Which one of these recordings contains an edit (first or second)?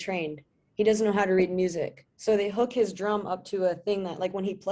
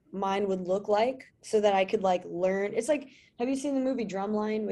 second